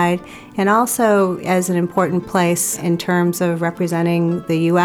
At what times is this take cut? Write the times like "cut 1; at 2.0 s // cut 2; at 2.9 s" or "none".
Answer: cut 1; at 2.8 s